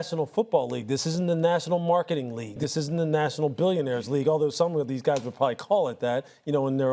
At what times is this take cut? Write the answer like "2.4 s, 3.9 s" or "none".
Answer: none